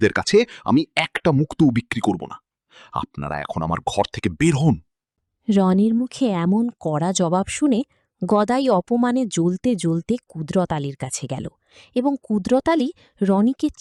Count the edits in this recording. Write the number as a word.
zero